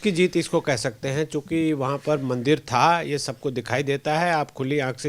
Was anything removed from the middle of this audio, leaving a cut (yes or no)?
no